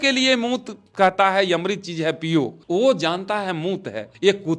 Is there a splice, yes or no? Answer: no